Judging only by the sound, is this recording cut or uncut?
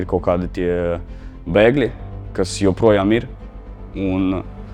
uncut